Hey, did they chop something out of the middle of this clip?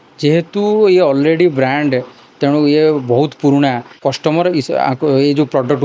yes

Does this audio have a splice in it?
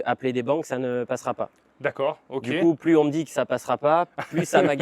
no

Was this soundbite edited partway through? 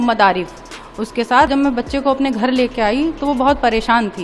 yes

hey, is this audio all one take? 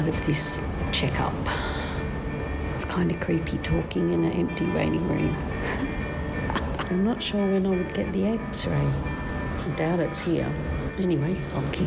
no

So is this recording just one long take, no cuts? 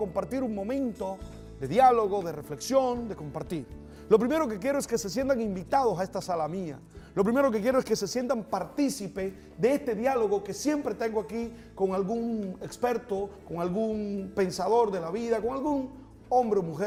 yes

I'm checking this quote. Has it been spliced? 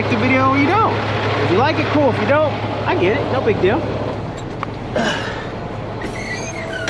no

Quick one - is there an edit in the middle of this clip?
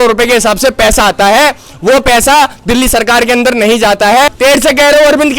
yes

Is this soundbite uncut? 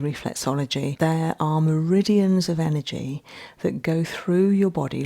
no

